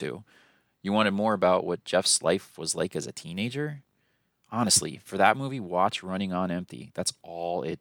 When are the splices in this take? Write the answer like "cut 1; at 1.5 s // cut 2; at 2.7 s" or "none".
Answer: none